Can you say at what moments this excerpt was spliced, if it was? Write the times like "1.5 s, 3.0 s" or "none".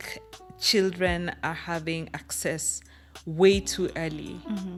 none